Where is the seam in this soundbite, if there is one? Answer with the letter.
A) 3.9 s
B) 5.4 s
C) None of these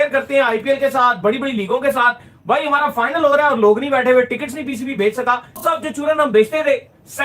A